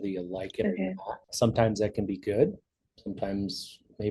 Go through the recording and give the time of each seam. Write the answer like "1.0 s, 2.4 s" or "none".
1.2 s